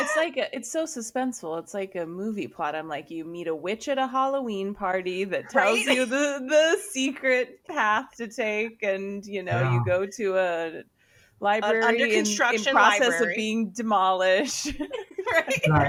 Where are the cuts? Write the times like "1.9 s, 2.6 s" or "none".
none